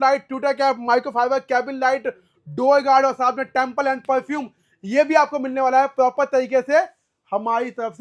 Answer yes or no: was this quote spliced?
no